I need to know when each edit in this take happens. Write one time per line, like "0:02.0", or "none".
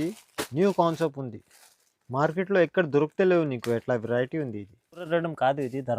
0:05.1